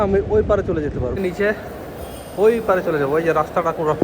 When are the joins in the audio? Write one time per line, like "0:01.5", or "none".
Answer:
0:01.2